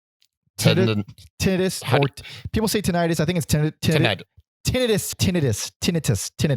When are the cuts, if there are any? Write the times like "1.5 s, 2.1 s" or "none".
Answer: 5.2 s